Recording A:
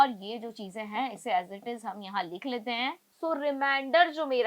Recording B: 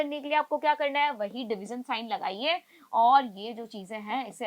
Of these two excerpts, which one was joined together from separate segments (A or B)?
A